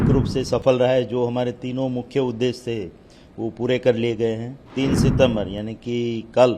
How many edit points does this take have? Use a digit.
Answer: 1